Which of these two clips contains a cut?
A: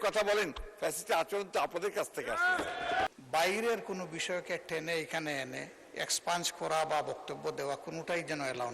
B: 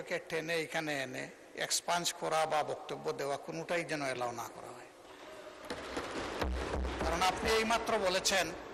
A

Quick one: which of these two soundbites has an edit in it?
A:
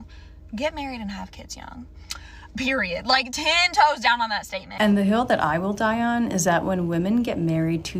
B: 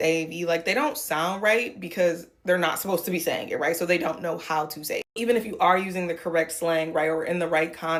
A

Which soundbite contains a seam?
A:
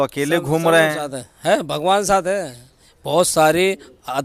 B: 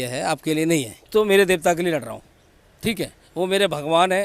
B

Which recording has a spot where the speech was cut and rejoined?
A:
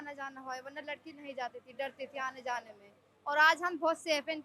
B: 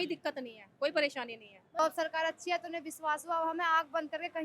B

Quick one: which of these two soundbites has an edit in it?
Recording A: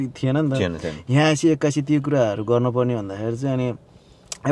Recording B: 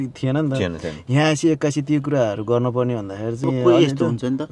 B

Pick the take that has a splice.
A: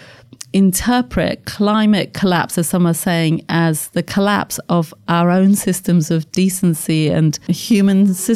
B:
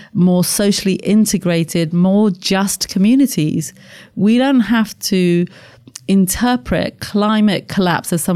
A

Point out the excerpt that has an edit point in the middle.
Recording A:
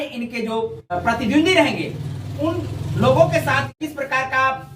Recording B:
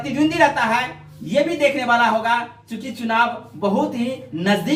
A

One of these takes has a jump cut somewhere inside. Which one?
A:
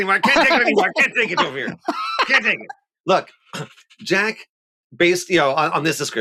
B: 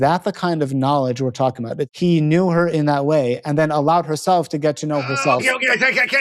B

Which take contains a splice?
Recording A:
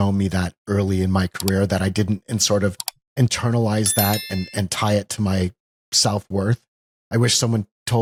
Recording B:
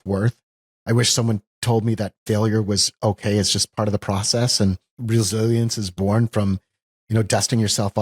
B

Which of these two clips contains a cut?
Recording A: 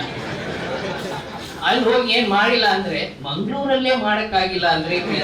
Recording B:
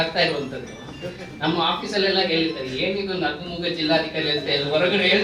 A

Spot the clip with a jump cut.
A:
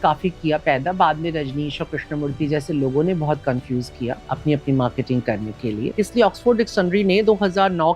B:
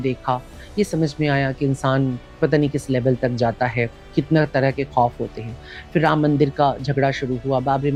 A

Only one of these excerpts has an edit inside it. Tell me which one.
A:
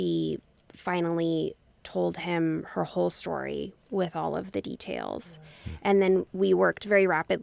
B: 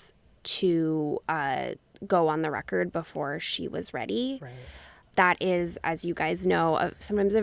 B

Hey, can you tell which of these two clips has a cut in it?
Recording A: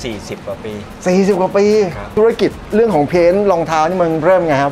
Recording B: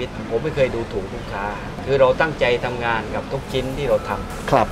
A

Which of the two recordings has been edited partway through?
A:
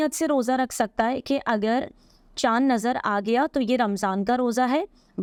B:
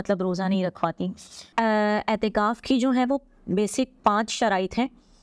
B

